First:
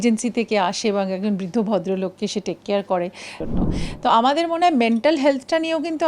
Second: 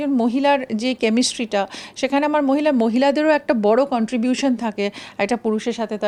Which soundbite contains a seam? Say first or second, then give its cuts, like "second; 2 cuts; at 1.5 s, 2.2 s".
first; 1 cut; at 3.4 s